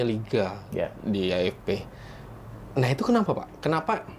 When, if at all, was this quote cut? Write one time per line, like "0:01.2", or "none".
none